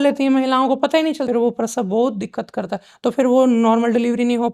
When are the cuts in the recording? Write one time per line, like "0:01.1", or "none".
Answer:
0:01.3